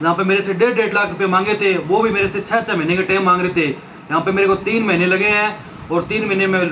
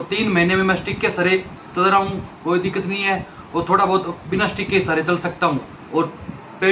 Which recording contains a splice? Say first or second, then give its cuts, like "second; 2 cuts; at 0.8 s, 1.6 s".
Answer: second; 1 cut; at 5.7 s